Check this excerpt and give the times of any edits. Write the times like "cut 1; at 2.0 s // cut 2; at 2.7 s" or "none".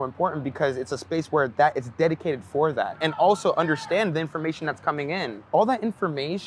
cut 1; at 3.0 s // cut 2; at 5.4 s